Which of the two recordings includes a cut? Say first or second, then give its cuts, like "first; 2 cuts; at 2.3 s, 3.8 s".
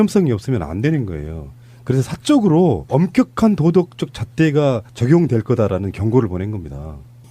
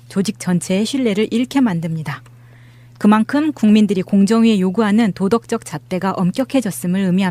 first; 1 cut; at 2.8 s